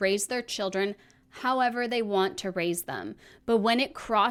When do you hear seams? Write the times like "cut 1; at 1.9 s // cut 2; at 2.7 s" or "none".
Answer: none